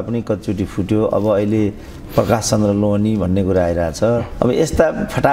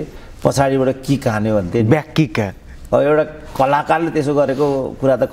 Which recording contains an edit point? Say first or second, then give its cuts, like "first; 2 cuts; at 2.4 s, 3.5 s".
first; 1 cut; at 4.3 s